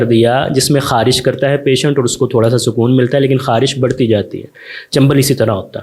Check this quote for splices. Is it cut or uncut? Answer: uncut